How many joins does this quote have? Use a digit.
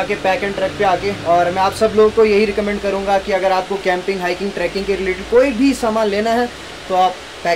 0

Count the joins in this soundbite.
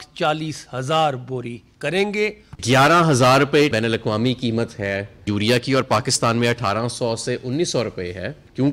1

